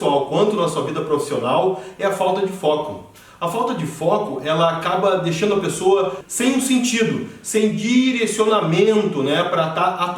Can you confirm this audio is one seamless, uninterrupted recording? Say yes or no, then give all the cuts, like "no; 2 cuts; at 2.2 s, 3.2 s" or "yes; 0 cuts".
no; 1 cut; at 6.2 s